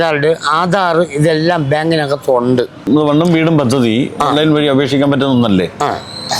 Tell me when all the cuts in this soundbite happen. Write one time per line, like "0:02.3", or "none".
0:02.8